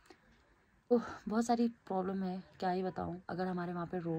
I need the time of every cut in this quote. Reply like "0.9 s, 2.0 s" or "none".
0.9 s